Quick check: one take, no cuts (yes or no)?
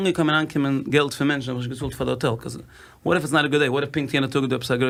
yes